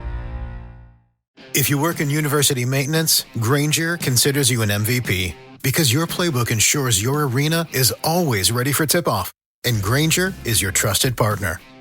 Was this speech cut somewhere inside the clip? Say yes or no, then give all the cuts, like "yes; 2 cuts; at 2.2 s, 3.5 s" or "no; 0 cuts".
yes; 1 cut; at 1.1 s